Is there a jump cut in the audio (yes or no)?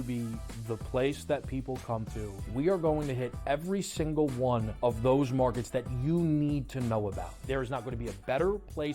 yes